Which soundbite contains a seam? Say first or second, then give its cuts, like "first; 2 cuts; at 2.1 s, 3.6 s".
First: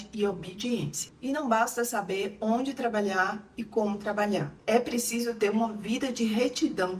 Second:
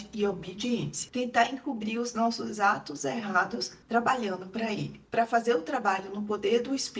second; 2 cuts; at 1.0 s, 5.0 s